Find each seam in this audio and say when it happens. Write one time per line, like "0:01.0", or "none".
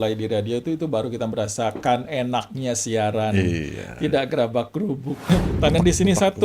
0:05.3